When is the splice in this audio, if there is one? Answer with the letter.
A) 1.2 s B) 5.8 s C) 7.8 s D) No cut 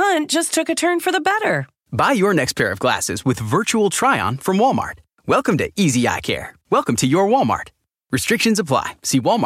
D